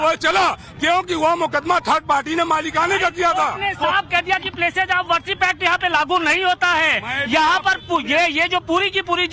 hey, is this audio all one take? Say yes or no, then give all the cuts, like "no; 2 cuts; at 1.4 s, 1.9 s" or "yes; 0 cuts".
yes; 0 cuts